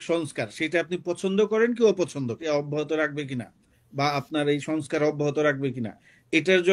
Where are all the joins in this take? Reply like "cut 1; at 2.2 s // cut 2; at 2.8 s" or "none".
cut 1; at 2.4 s